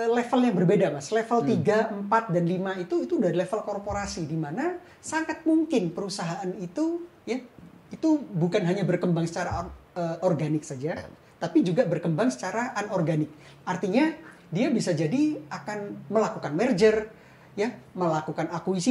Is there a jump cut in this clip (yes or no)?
no